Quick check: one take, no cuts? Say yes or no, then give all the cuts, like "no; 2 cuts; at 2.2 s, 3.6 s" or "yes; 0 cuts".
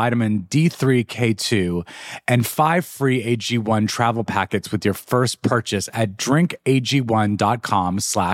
yes; 0 cuts